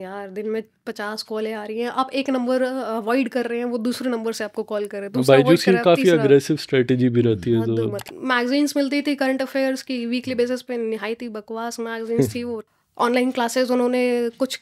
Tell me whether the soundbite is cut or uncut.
cut